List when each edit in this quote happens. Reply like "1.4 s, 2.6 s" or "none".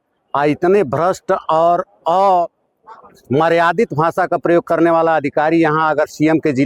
none

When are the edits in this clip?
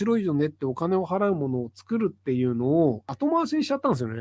3.1 s

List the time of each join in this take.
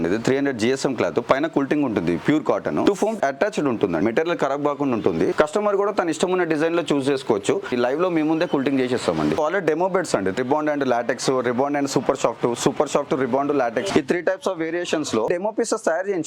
2.8 s, 4.0 s, 5.3 s, 7.7 s, 9.4 s, 10.3 s, 13.9 s, 15.3 s

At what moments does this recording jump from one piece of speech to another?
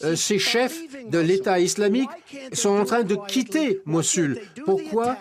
none

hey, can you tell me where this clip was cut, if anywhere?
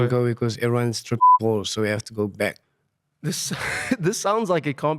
2.7 s

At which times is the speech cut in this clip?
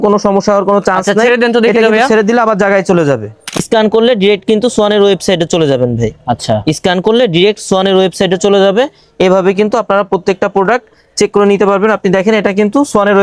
3.6 s

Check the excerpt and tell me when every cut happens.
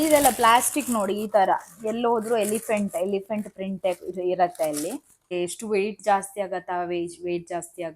5.3 s

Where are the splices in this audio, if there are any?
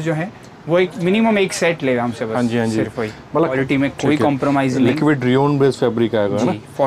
3.5 s

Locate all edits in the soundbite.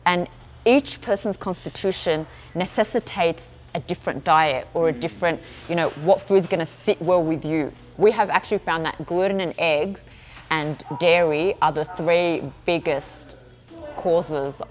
7.9 s

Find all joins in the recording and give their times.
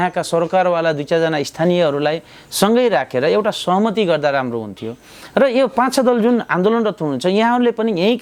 none

